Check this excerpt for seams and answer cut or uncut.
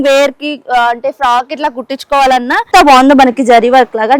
cut